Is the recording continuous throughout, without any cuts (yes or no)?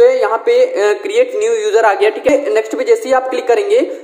no